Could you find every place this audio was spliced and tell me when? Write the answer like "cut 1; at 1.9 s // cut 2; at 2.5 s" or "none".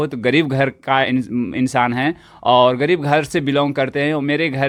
none